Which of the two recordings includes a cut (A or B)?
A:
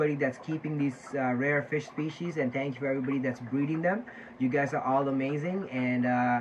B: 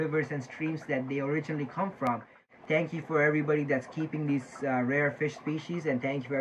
B